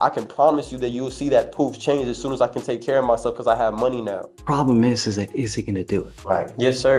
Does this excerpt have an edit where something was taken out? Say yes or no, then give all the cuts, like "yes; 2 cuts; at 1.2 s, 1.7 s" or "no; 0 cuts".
yes; 2 cuts; at 4.3 s, 6.1 s